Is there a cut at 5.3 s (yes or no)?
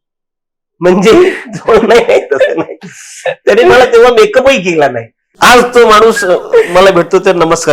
yes